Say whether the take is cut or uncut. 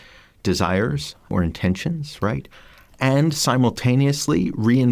cut